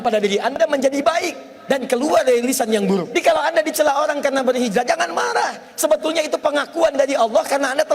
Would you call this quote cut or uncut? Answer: cut